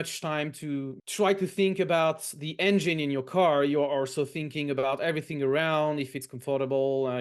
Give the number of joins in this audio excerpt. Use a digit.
1